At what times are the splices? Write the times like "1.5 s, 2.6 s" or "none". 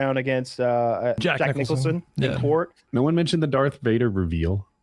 1.2 s, 2.8 s